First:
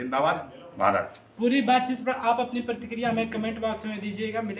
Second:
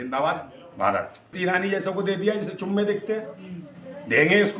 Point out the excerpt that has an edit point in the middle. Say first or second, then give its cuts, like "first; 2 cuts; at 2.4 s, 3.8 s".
second; 1 cut; at 1.3 s